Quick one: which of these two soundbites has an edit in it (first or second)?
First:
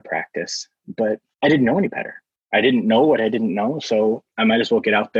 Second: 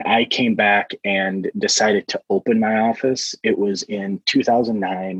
first